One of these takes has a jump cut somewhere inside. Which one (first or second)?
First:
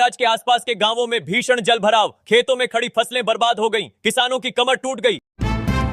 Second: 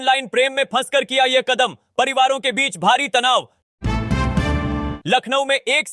second